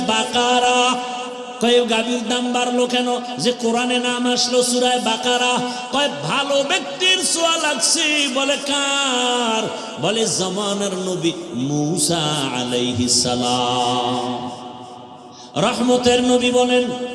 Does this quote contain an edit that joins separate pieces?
yes; 1 cut; at 1.4 s

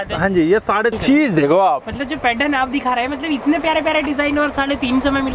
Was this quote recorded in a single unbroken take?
no; 1 cut; at 0.9 s

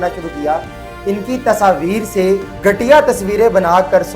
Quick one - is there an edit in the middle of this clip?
yes; 1 cut; at 2.5 s

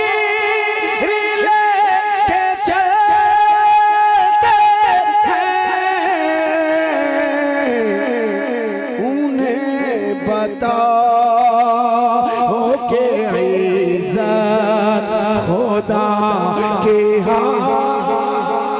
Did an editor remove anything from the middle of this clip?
no; 0 cuts

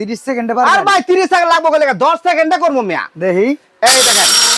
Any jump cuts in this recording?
no; 0 cuts

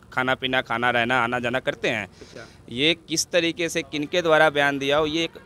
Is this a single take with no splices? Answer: yes; 0 cuts

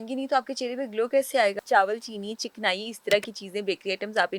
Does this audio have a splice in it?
yes; 1 cut; at 1.6 s

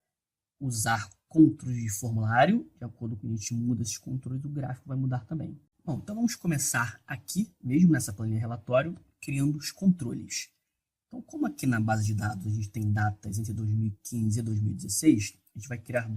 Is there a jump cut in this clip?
yes; 1 cut; at 12.1 s

